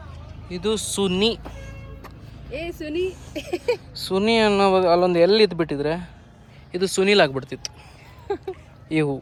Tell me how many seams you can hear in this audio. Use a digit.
0